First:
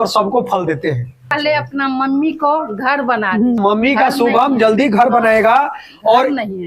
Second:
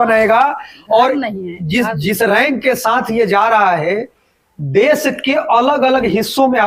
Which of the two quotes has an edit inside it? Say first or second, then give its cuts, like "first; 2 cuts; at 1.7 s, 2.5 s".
first; 2 cuts; at 1.4 s, 3.6 s